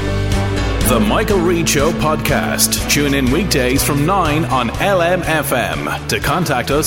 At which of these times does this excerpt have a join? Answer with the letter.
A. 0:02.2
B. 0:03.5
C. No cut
C